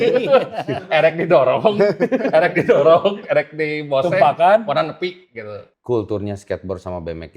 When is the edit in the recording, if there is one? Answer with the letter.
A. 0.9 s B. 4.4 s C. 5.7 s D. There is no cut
C